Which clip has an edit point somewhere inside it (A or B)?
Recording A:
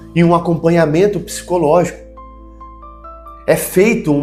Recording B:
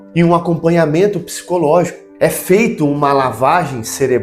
B